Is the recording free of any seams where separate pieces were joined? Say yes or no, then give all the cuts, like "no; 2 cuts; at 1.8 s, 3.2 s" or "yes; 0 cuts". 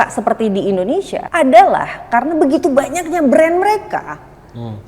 no; 1 cut; at 1.2 s